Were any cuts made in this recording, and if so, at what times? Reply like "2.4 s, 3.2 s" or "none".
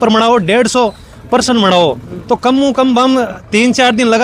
none